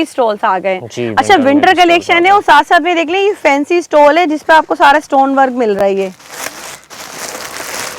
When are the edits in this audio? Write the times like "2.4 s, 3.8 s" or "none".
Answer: none